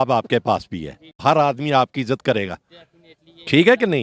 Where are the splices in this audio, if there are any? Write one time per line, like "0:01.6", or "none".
0:01.2